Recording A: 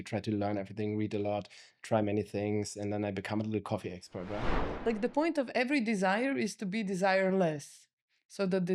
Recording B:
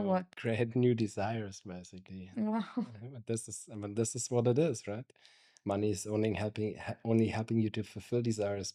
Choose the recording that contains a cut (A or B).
A